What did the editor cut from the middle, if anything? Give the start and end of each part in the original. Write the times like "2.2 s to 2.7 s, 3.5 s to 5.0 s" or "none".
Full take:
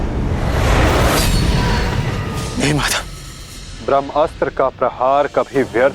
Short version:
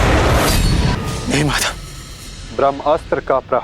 1.6 s to 2.2 s